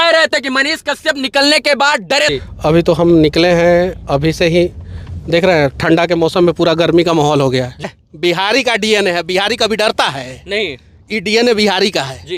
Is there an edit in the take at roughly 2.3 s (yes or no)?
yes